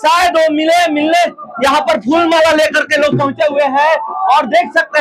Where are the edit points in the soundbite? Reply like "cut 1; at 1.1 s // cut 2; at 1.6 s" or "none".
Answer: none